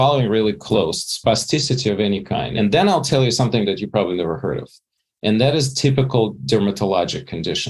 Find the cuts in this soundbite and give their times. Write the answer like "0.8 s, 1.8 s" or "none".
2.5 s, 6.4 s

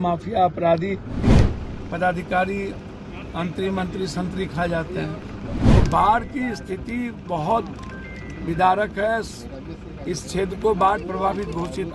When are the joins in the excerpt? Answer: 1.2 s, 5.5 s

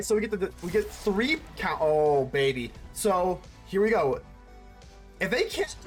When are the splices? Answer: none

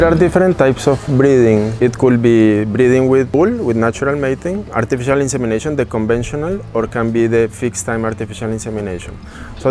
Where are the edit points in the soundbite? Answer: 1.8 s, 3.3 s, 4.7 s

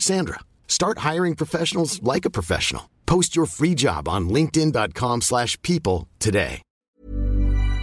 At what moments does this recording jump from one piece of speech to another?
6.7 s

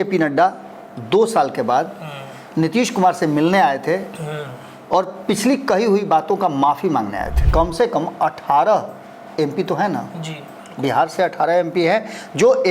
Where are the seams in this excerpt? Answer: 7.4 s

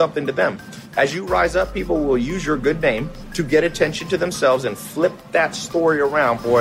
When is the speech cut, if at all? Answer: 3.2 s

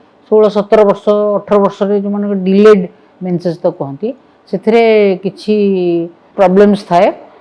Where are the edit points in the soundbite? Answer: 6.2 s

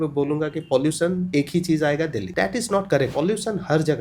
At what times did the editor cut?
1.3 s, 2.3 s, 3.1 s

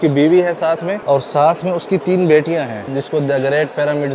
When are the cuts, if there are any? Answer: 0.9 s, 2.9 s

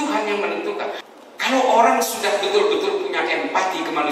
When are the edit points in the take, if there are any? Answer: 1.0 s

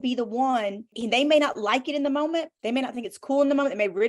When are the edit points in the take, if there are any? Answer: 0.9 s, 2.6 s

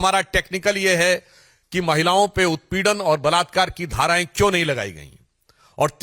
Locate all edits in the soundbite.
none

